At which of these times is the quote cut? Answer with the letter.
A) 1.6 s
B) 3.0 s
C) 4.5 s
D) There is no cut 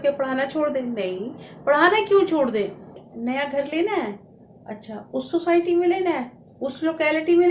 B